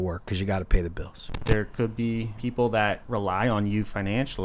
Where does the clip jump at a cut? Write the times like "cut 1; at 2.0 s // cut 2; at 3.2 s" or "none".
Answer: cut 1; at 1.3 s // cut 2; at 2.3 s // cut 3; at 3.0 s